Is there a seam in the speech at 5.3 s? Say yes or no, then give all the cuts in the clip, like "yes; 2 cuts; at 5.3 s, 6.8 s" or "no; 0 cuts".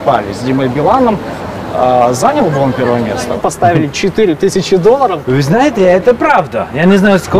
yes; 2 cuts; at 3.4 s, 5.3 s